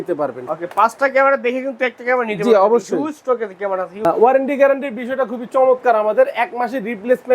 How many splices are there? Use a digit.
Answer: 1